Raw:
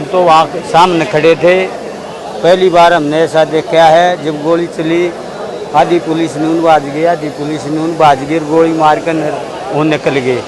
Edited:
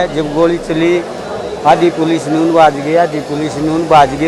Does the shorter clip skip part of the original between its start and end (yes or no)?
no